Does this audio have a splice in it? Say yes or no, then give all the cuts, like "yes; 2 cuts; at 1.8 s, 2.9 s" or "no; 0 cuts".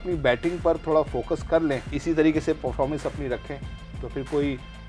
yes; 1 cut; at 1.9 s